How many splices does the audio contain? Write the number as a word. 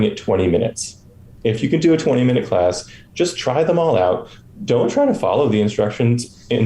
zero